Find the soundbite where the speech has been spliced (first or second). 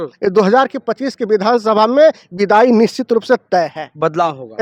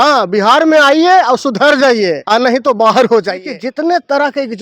second